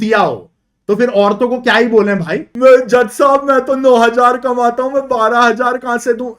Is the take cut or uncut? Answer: cut